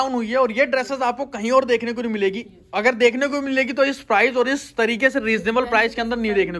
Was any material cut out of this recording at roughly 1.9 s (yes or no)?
no